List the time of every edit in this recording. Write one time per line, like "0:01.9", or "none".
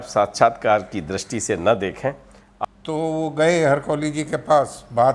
0:02.4